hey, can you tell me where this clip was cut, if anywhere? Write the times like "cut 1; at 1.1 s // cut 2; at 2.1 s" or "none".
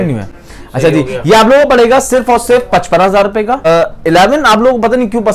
cut 1; at 3.7 s